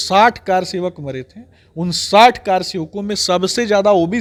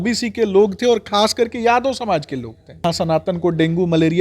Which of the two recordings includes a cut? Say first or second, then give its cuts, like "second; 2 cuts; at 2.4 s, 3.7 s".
second; 1 cut; at 2.8 s